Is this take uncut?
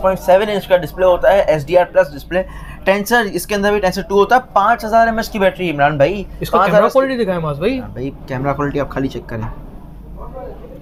yes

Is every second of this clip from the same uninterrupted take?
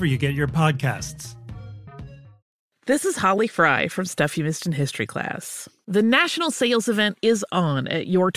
no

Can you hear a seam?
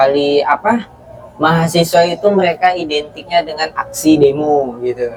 no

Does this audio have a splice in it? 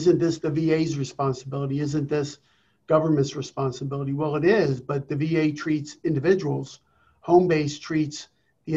no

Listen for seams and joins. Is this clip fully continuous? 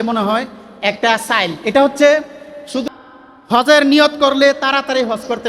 no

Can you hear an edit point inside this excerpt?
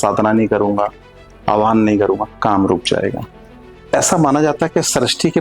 yes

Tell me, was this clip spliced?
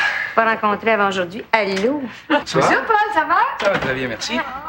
yes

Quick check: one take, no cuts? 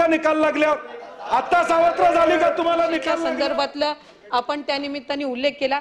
no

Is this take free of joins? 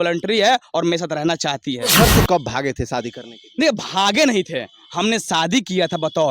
no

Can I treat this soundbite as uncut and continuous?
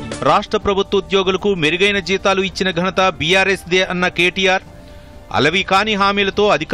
yes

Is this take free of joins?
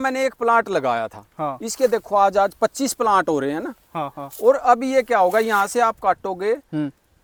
yes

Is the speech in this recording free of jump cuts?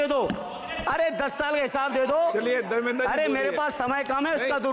yes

